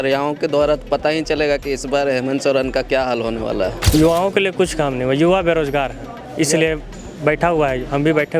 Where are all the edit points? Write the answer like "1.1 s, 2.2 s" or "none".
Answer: 3.8 s